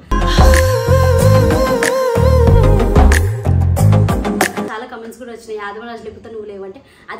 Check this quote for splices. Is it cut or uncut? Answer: cut